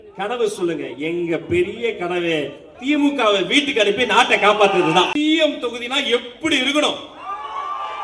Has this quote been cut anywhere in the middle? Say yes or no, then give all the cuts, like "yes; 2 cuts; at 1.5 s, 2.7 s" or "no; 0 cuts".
yes; 1 cut; at 5.1 s